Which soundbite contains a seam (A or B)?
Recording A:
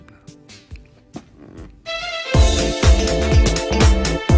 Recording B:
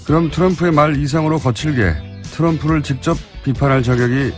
B